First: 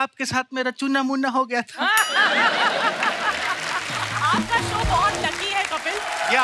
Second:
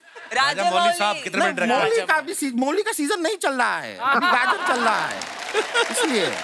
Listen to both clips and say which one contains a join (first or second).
first